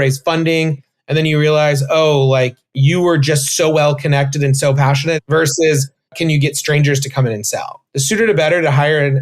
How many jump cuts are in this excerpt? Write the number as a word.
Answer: three